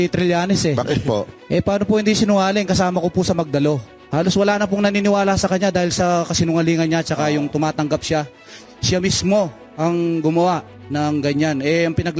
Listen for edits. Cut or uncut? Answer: cut